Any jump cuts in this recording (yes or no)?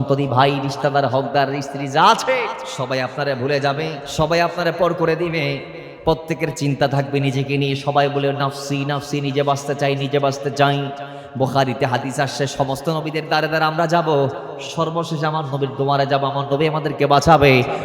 yes